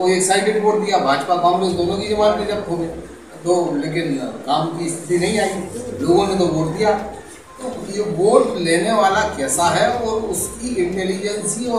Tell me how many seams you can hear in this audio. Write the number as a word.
zero